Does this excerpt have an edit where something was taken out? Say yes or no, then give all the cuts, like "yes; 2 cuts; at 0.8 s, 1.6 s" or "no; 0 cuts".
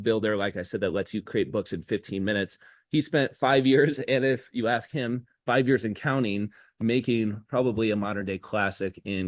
no; 0 cuts